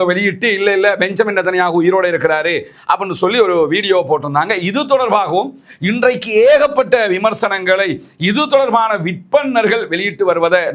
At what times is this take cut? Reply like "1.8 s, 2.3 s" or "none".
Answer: none